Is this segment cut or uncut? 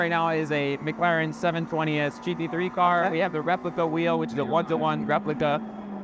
uncut